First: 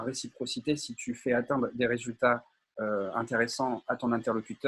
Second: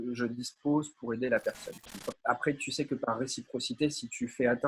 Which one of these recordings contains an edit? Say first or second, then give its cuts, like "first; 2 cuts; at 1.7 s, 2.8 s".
second; 1 cut; at 2.0 s